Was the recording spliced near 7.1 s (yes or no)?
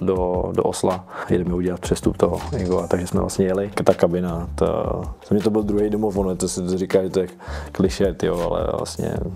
no